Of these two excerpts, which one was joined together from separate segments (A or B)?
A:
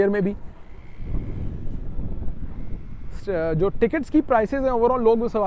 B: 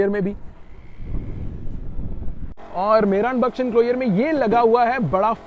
B